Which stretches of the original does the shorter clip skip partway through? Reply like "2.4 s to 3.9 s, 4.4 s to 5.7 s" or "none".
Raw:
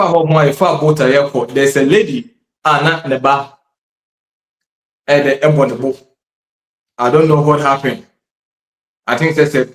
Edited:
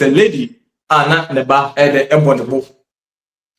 3.5 s to 5.0 s